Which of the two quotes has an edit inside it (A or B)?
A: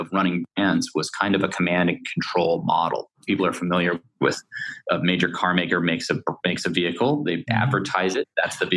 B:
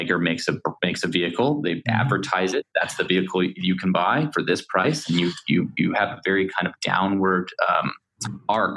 A